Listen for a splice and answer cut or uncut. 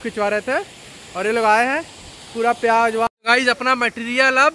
cut